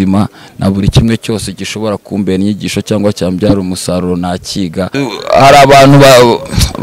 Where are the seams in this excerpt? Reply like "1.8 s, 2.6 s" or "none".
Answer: 5.0 s